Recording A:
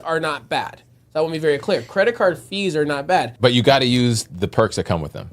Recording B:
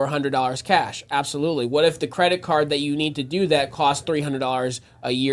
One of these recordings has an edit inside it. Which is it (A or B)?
A